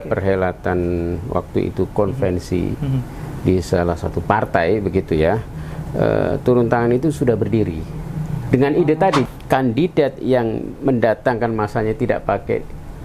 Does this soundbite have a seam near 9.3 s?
yes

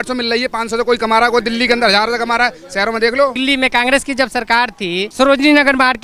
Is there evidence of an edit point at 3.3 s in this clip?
yes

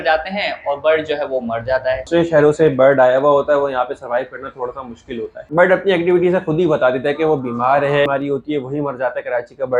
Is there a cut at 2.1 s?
yes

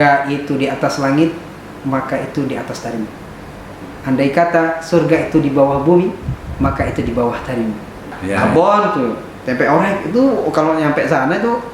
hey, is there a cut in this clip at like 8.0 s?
yes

